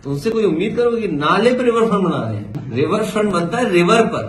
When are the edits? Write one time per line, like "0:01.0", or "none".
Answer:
0:02.6